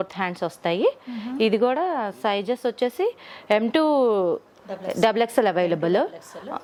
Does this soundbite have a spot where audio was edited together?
no; 0 cuts

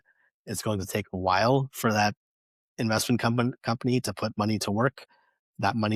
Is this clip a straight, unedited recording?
yes; 0 cuts

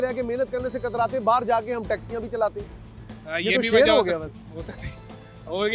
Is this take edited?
no; 0 cuts

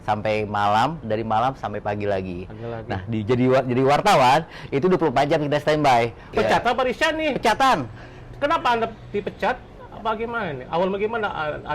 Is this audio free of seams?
no; 1 cut; at 6.2 s

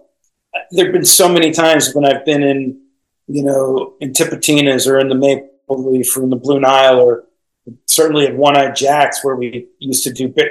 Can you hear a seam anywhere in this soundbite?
no; 0 cuts

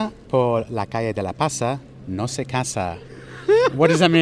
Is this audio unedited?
yes; 0 cuts

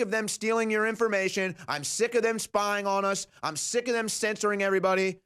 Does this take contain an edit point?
no; 0 cuts

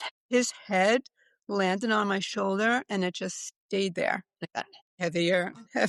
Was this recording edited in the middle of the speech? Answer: no; 0 cuts

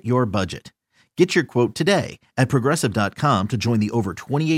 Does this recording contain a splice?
no; 0 cuts

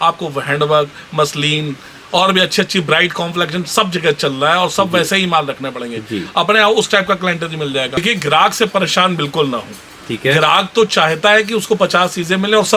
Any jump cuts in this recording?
yes; 1 cut; at 8.0 s

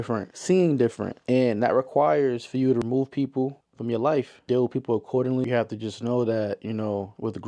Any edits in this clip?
no; 0 cuts

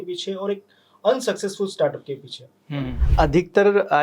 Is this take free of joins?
no; 1 cut; at 3.0 s

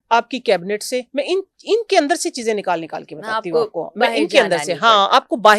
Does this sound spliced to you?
no; 0 cuts

